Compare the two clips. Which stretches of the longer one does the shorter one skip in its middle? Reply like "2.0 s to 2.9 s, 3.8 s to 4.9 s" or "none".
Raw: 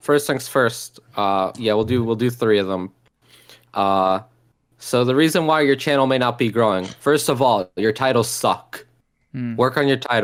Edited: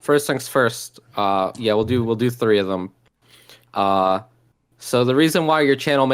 none